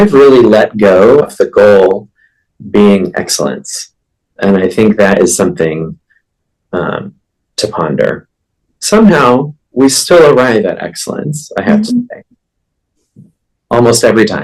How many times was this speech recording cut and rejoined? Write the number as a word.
one